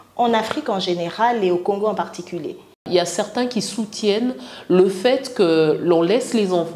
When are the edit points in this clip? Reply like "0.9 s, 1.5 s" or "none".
2.9 s

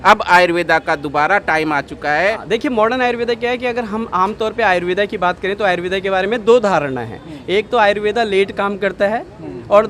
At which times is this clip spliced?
2.4 s

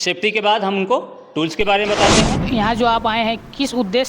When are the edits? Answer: 2.5 s

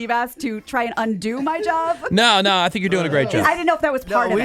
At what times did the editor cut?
3.4 s

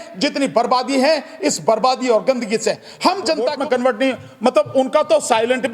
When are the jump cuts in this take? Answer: 3.5 s

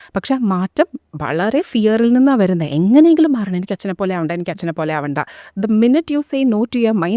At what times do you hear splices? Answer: none

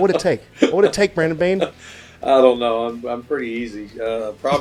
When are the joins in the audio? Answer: none

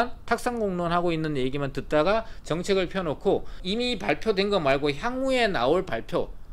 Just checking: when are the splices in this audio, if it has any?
3.6 s

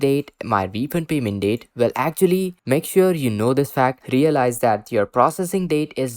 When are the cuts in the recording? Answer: none

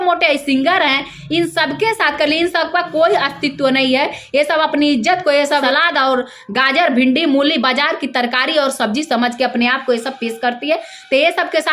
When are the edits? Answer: 5.6 s

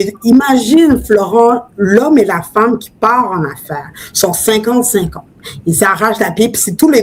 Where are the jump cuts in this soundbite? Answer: none

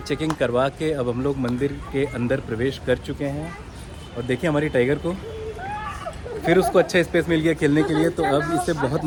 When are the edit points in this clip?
none

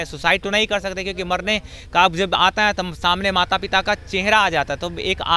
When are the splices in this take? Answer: none

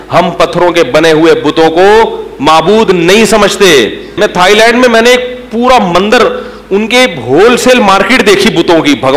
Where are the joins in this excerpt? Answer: 4.2 s

